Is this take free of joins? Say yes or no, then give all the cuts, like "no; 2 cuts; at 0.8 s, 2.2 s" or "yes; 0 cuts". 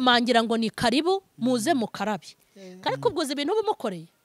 no; 1 cut; at 2.8 s